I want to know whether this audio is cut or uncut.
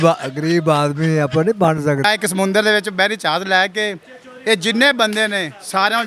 cut